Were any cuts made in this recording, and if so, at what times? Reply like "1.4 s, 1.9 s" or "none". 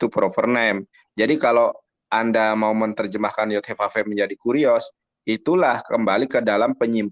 none